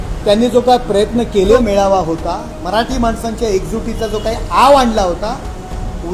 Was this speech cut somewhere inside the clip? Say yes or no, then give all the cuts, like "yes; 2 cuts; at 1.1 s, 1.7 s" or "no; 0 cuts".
yes; 1 cut; at 1.6 s